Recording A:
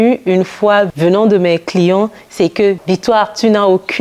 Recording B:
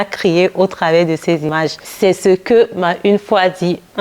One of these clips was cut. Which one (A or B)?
A